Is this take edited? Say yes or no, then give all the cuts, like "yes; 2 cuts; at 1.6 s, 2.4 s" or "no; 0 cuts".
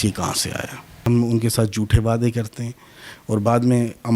yes; 1 cut; at 1.0 s